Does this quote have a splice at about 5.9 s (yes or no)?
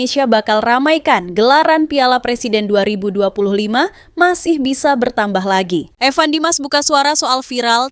yes